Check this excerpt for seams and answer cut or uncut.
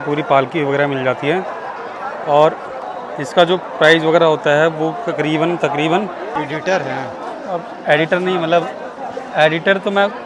cut